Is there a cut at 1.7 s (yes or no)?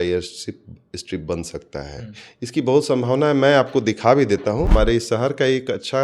no